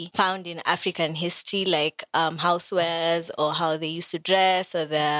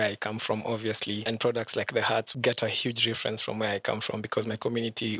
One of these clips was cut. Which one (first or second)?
second